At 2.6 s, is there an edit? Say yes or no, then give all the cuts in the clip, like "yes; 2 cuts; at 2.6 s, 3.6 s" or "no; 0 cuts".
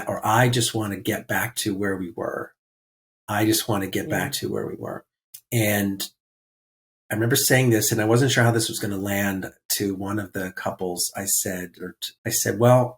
no; 1 cut; at 12.1 s